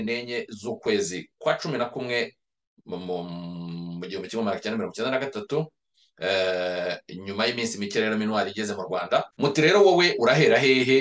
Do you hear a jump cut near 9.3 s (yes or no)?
yes